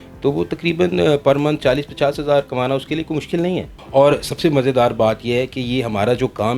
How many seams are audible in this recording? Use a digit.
1